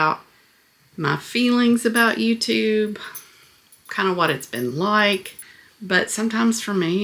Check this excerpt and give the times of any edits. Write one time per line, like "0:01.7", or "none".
0:05.4